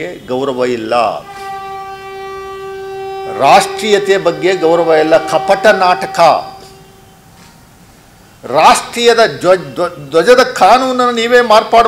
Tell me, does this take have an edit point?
no; 0 cuts

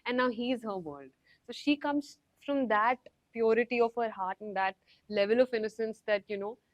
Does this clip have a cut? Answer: no; 0 cuts

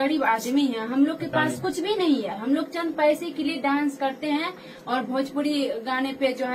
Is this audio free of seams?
yes; 0 cuts

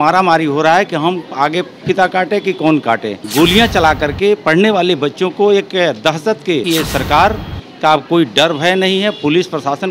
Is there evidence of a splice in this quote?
yes; 2 cuts; at 3.2 s, 6.6 s

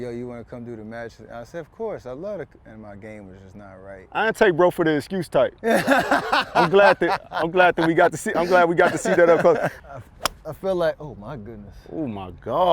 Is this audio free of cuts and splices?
no; 1 cut; at 9.7 s

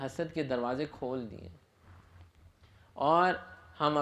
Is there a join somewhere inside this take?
no; 0 cuts

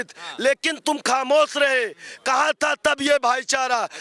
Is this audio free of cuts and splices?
yes; 0 cuts

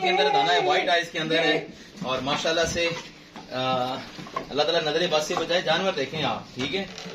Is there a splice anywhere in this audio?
no; 0 cuts

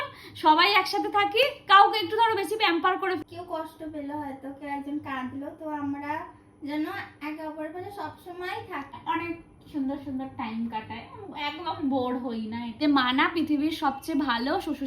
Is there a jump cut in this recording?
yes; 3 cuts; at 3.2 s, 8.9 s, 12.8 s

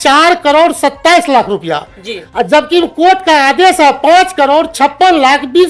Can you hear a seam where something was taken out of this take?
no; 0 cuts

